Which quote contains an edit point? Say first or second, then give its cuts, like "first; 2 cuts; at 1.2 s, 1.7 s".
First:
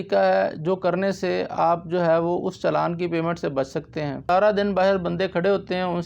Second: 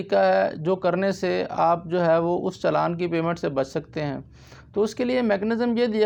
first; 1 cut; at 4.2 s